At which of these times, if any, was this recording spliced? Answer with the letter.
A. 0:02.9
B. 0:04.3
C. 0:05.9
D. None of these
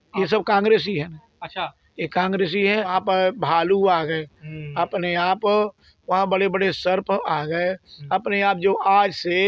A